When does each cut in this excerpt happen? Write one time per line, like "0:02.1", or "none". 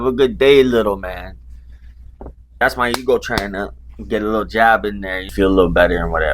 0:02.5
0:05.2